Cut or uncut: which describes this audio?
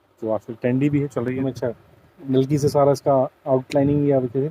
cut